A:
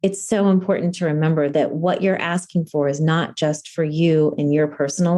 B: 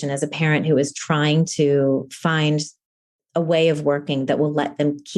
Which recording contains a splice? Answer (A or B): A